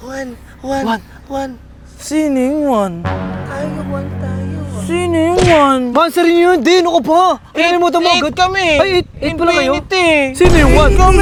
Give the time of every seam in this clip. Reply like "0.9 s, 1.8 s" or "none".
none